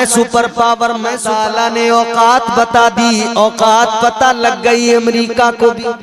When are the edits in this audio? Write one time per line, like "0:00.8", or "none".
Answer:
0:01.2